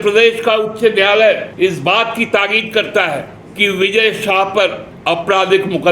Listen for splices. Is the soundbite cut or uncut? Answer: cut